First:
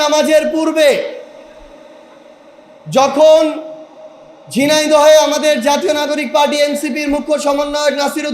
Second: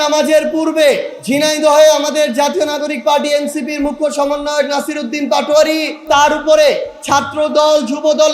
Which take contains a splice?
second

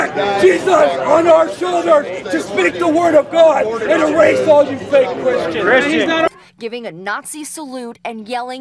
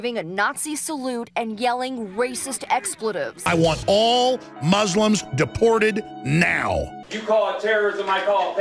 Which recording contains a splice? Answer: second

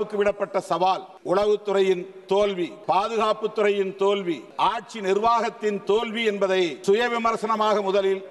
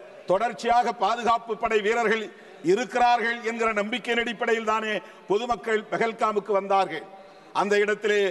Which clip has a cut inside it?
first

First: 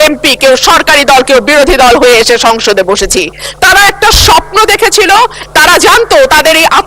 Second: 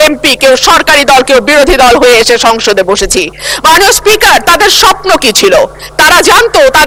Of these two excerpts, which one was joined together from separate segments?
first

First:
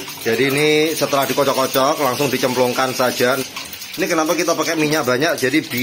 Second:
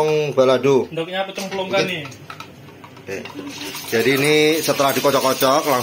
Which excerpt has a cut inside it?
first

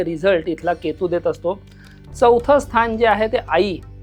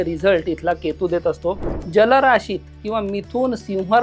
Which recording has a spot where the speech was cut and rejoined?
second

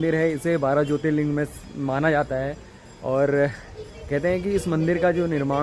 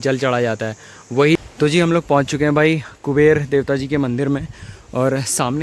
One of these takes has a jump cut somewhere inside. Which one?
second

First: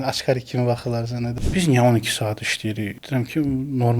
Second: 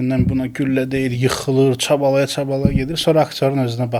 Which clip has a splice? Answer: first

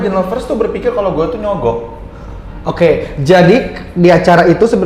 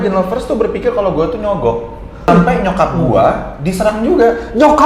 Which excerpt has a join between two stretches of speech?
second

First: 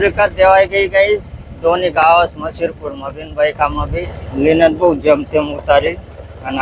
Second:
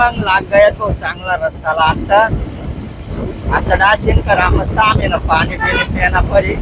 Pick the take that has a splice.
first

